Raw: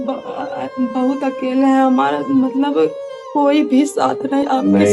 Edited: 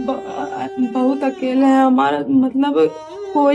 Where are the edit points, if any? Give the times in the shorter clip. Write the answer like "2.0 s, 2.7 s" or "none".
none